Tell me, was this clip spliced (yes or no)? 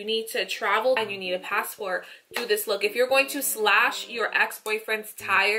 yes